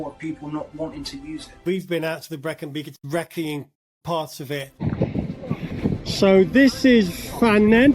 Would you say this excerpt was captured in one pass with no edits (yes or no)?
no